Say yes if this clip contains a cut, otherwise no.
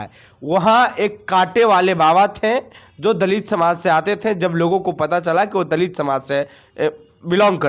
no